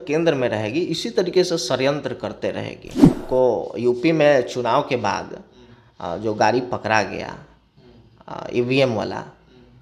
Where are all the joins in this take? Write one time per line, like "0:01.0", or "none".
0:03.3